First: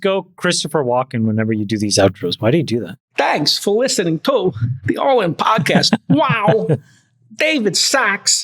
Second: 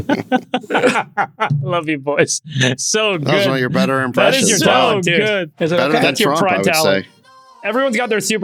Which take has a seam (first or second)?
first